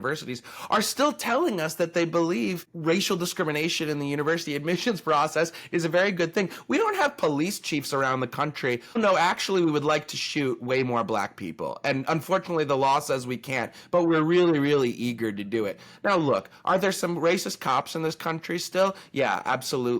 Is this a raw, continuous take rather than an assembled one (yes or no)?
no